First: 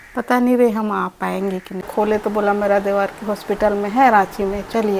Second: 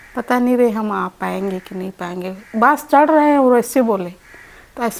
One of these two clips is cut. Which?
first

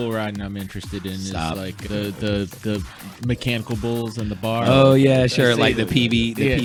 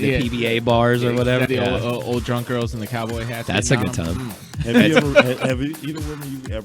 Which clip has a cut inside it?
second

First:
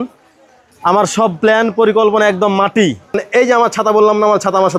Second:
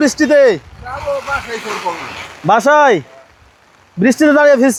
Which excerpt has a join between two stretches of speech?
first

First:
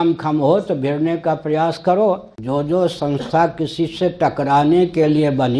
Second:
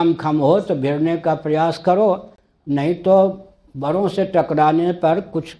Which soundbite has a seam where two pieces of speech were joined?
first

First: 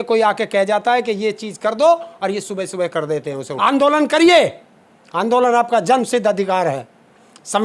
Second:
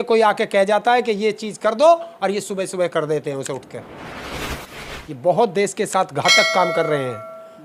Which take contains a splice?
first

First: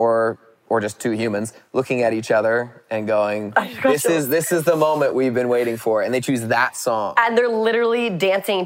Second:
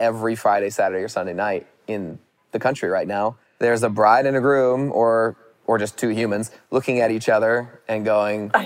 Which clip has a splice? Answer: second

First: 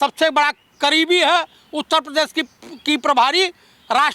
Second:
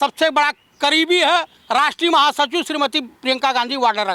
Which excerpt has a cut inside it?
second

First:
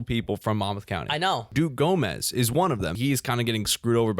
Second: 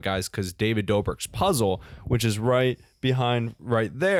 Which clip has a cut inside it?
first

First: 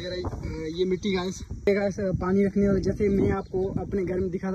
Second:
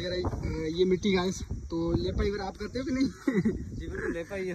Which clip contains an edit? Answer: first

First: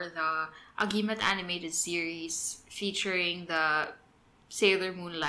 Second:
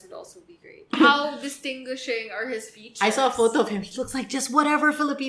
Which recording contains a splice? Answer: second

